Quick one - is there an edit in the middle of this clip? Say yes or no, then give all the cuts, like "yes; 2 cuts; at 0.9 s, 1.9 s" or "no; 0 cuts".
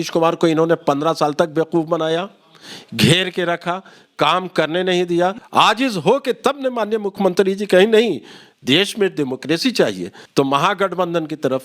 yes; 2 cuts; at 5.4 s, 10.1 s